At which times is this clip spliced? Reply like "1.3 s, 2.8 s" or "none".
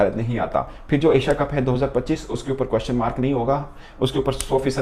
none